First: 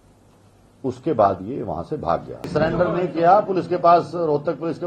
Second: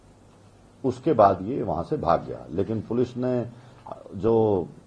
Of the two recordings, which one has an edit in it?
first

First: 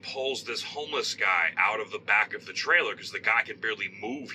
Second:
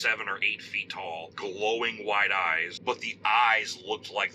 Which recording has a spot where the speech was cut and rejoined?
second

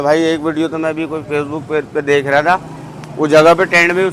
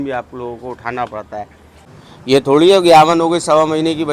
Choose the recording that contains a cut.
second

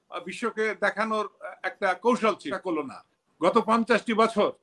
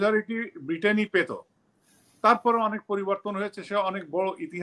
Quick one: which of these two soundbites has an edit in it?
first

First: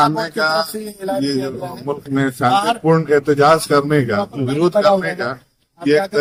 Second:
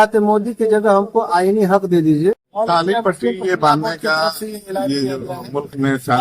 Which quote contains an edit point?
second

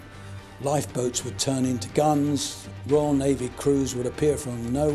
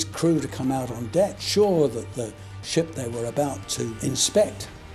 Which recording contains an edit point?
second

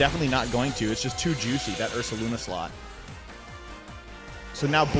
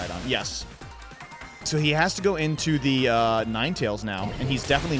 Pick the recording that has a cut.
second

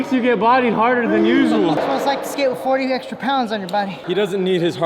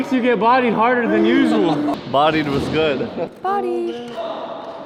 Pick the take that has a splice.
first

